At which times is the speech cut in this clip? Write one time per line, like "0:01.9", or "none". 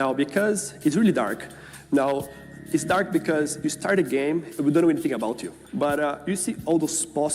0:04.5
0:05.5